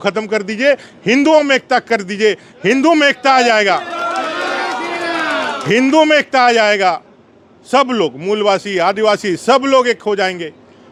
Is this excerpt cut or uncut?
uncut